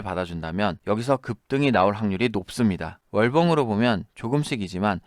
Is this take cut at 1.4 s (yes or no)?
no